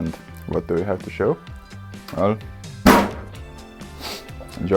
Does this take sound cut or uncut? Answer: uncut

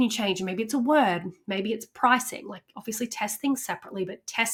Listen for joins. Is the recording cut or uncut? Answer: uncut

